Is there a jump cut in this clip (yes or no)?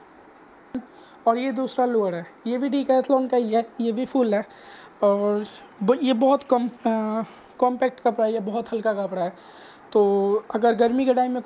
no